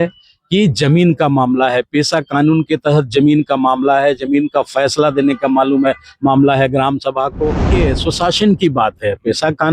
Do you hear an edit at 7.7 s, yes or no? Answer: yes